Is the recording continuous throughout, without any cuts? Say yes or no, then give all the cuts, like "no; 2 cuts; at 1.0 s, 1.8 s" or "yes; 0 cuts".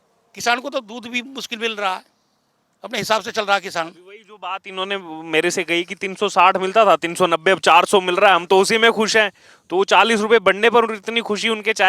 yes; 0 cuts